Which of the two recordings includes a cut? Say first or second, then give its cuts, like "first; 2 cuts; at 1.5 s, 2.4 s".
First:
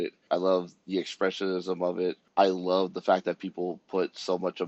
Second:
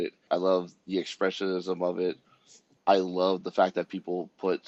first; 1 cut; at 2.2 s